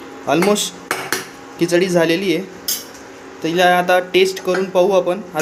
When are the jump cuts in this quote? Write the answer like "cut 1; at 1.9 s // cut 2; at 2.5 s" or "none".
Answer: none